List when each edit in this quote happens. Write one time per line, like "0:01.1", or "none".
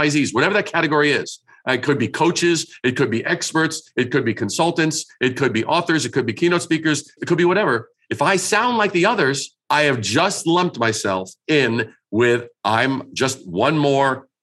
0:07.2
0:09.5
0:12.5